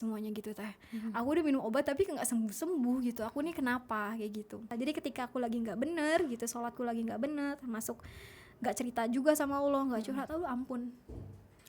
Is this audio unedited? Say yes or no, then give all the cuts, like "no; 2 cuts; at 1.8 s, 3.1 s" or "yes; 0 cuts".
no; 1 cut; at 4.7 s